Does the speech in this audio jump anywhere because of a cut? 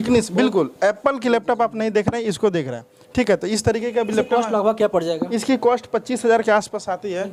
no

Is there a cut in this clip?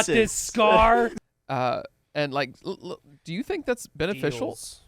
yes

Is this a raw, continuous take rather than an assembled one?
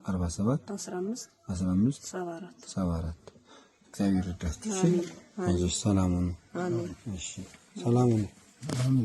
yes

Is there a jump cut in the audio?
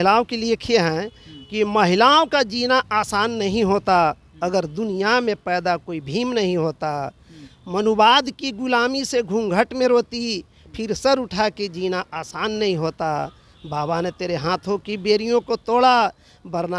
no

